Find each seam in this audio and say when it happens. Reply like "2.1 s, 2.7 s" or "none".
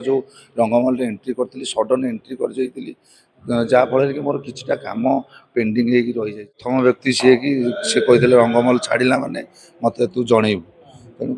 6.6 s